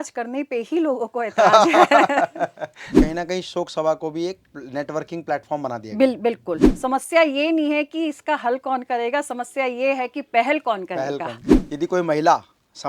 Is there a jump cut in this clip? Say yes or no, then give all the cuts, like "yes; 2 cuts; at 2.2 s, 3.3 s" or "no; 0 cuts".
yes; 3 cuts; at 3.0 s, 6.7 s, 11.7 s